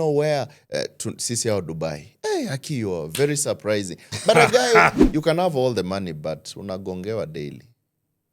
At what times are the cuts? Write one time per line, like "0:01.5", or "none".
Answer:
0:05.0